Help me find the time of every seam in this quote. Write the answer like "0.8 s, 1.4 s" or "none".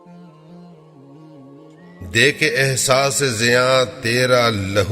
1.5 s